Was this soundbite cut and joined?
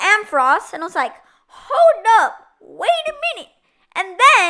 no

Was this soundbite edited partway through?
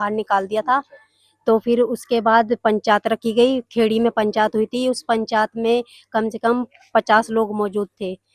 no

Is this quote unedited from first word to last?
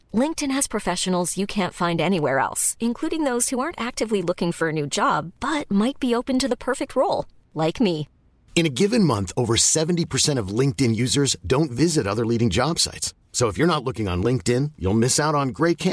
yes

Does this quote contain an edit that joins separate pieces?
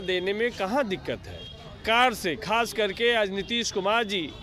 yes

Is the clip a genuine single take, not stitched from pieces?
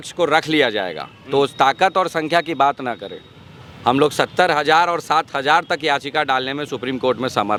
yes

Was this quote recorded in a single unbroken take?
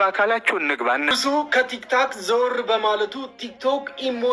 no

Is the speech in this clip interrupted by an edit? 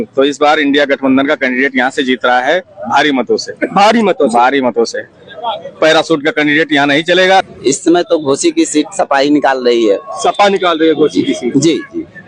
yes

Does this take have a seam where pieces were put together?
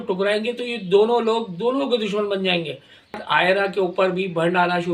yes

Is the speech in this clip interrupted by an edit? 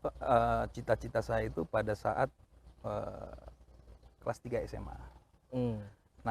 no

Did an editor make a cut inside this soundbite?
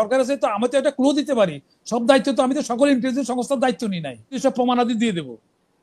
yes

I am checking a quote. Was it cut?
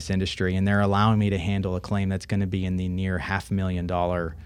no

